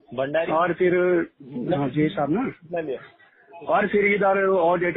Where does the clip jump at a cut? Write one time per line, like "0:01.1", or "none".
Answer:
none